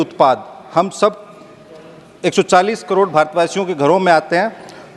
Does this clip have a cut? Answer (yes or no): no